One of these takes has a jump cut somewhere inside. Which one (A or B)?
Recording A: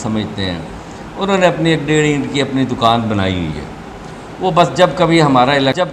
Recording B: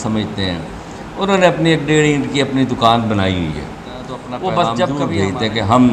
B